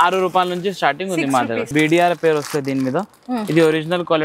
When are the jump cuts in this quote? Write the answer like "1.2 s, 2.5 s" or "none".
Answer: 1.7 s